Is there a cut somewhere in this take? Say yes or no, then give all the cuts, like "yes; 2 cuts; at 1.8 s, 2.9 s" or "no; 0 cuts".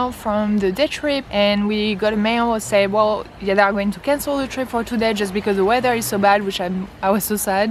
no; 0 cuts